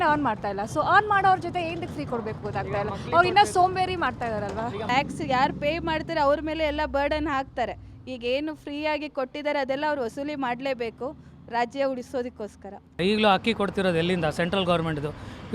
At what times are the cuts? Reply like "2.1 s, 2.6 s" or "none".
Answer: 4.9 s, 12.9 s